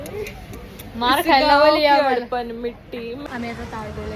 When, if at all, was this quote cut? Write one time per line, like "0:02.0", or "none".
0:03.2